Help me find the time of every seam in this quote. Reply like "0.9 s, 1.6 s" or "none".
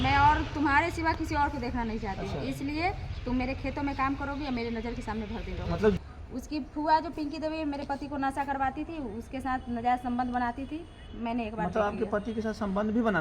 6.0 s